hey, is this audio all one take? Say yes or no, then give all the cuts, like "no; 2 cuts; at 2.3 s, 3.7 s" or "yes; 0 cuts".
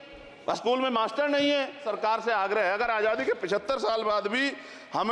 no; 1 cut; at 1.9 s